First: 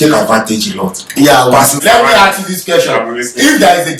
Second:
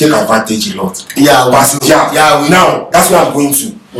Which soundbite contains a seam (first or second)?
first